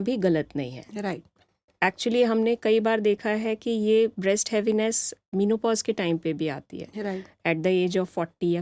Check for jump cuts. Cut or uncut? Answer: uncut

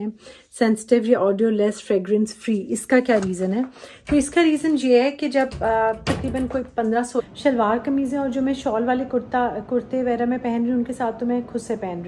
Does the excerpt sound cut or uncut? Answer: cut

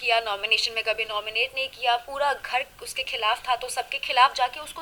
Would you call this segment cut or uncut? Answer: uncut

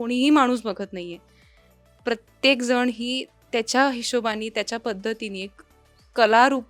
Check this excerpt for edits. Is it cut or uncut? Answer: uncut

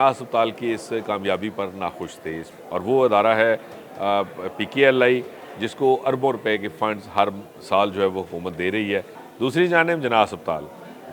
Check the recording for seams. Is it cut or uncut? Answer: cut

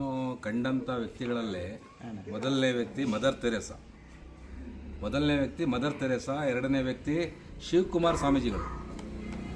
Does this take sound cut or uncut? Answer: uncut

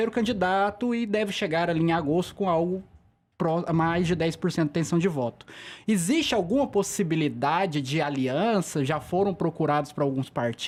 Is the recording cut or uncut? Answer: uncut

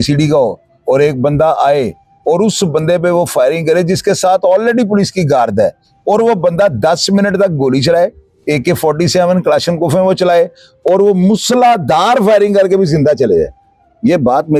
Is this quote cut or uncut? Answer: uncut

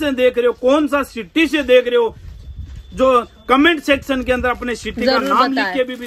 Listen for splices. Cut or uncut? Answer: uncut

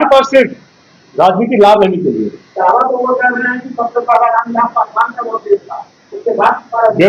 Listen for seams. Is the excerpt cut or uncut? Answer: uncut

